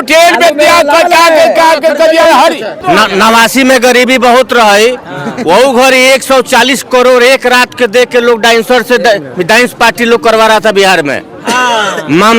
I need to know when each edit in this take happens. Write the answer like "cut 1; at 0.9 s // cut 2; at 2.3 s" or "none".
cut 1; at 2.7 s